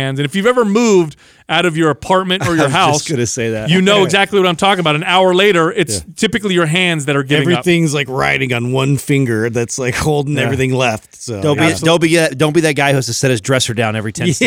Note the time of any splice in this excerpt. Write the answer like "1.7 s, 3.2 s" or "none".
none